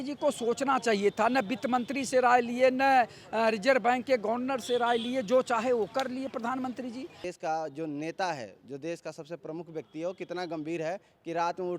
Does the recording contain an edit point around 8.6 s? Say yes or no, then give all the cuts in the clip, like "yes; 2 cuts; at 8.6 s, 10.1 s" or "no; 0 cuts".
no; 1 cut; at 7.3 s